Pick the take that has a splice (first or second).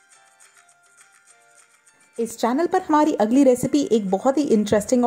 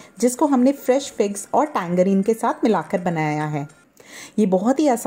first